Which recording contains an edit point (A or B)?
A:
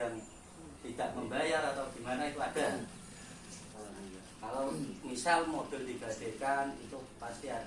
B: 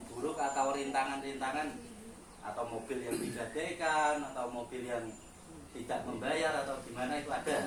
A